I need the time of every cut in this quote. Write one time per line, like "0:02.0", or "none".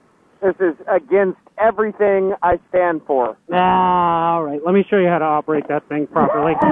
none